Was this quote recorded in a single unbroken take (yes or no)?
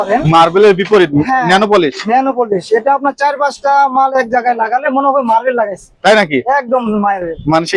yes